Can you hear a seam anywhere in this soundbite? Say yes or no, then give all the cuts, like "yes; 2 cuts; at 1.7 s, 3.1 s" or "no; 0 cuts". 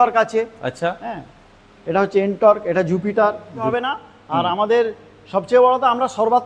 yes; 1 cut; at 3.7 s